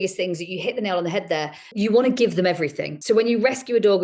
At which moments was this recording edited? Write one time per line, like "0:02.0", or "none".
0:01.6
0:02.9